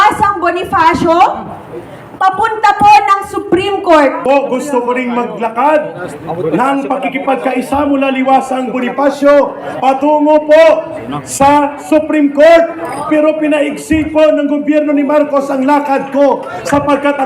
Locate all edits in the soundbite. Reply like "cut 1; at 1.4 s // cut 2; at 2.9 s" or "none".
cut 1; at 4.2 s